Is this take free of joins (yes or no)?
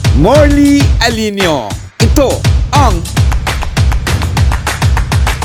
yes